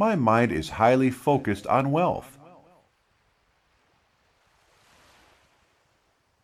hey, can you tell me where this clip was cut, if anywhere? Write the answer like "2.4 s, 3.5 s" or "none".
2.9 s